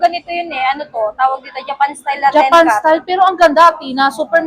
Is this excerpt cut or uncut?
uncut